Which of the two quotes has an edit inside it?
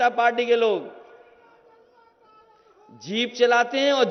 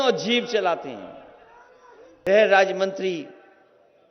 second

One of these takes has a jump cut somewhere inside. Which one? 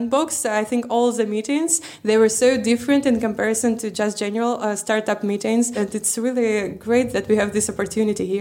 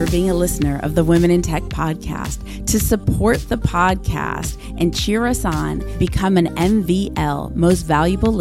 first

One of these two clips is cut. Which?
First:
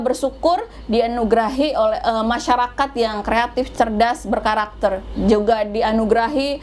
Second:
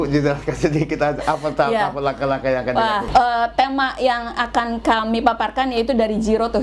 second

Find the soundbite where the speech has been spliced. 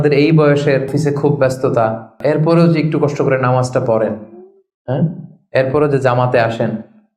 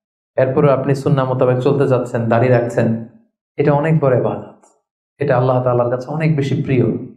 first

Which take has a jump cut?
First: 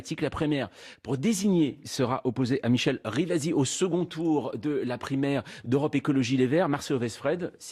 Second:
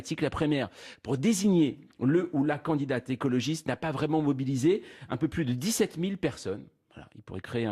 second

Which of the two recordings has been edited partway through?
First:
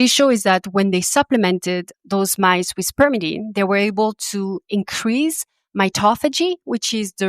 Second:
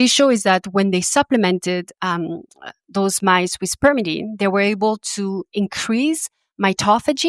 first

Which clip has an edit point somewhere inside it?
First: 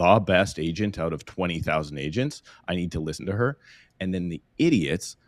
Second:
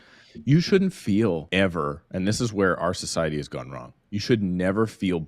second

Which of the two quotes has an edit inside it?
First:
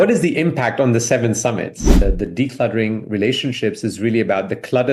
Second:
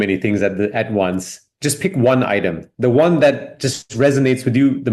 first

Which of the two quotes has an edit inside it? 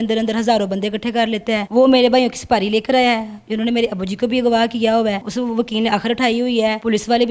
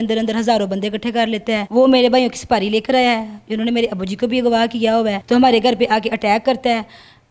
first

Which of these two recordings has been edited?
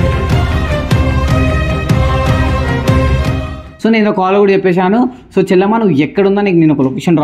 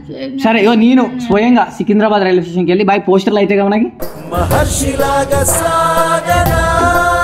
first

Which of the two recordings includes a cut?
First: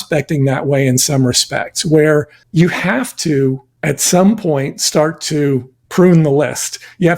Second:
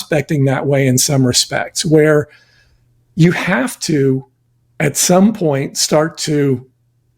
first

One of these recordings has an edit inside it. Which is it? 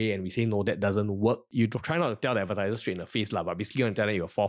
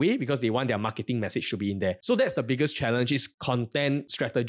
second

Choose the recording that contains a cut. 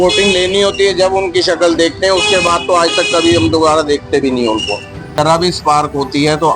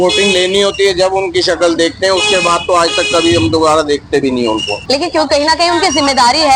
first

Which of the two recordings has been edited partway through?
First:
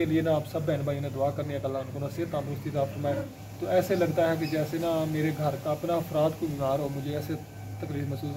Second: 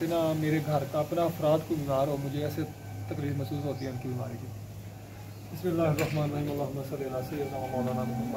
first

